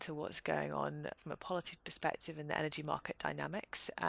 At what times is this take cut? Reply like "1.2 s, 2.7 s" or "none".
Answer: 1.2 s